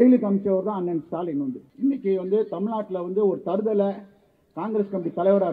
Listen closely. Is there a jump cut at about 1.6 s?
yes; 1 cut; at 1.6 s

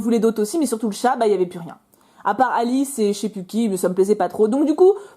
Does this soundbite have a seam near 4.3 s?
no; 1 cut; at 2.5 s

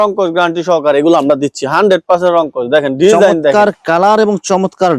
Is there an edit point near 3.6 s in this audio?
no; 0 cuts

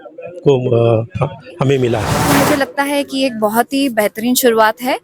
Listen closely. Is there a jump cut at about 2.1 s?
yes; 1 cut; at 2.1 s

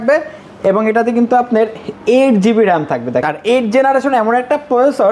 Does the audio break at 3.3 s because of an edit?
yes; 1 cut; at 3.3 s

